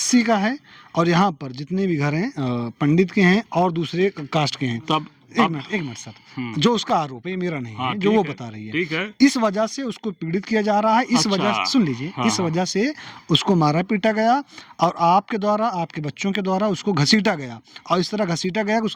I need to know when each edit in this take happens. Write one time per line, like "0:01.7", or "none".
none